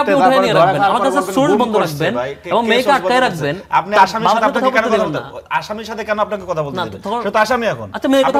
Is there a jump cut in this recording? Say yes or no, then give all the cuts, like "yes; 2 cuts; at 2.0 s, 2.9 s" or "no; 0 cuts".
no; 0 cuts